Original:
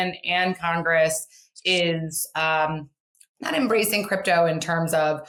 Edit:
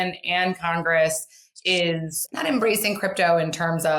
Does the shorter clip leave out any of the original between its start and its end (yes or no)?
yes